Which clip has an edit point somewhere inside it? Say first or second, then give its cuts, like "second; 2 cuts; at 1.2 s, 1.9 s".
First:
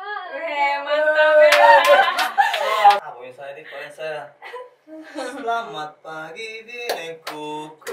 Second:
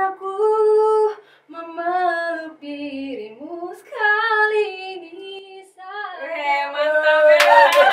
first; 1 cut; at 3.0 s